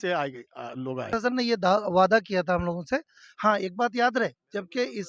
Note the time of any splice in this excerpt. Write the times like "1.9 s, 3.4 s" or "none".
1.1 s